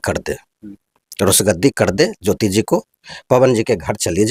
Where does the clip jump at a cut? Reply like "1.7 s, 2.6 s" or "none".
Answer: none